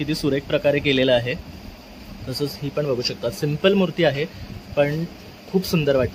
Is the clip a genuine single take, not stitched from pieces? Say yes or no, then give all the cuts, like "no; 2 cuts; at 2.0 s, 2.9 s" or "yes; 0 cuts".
yes; 0 cuts